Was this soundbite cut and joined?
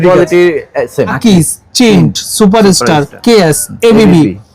yes; 2 cuts; at 1.2 s, 3.1 s

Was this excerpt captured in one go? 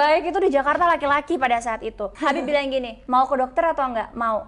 yes; 0 cuts

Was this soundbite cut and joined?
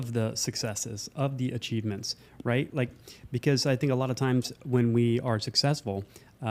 no; 0 cuts

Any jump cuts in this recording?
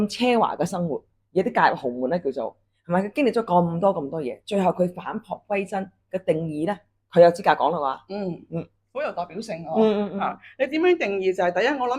no; 0 cuts

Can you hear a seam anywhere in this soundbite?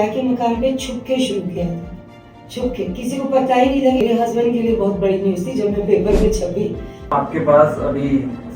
yes; 2 cuts; at 4.0 s, 7.1 s

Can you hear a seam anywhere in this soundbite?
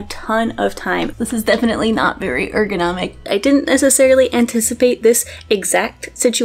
yes; 2 cuts; at 1.1 s, 3.3 s

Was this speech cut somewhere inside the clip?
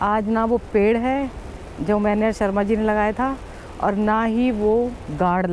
no; 0 cuts

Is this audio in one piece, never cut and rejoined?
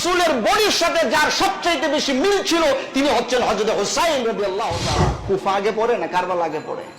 no; 1 cut; at 5.2 s

